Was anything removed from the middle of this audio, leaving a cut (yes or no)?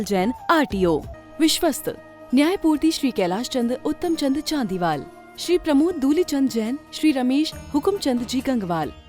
yes